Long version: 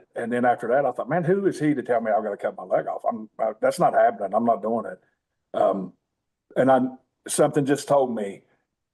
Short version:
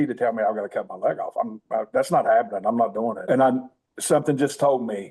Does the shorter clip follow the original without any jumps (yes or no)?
no